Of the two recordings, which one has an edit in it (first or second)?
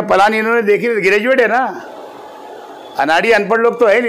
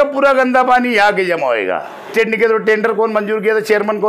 second